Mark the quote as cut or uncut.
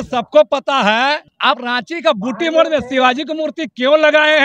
cut